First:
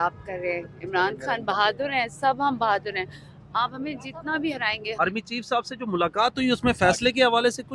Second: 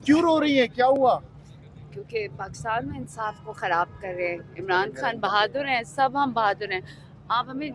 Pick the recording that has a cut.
first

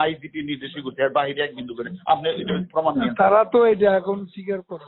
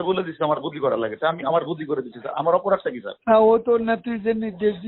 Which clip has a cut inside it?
second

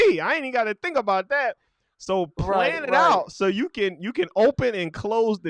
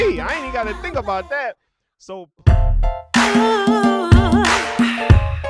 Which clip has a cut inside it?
second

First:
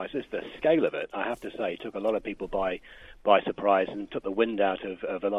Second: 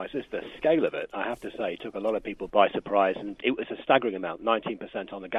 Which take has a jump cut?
second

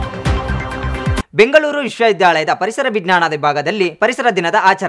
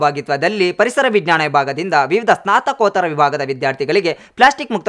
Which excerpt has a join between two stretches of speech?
first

